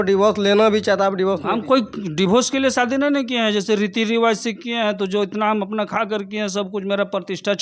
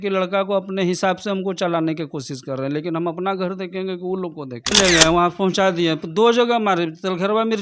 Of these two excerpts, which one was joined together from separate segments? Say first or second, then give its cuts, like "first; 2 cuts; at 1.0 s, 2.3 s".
second; 1 cut; at 4.7 s